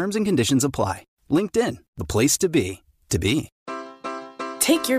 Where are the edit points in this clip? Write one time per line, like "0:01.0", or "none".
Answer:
0:03.6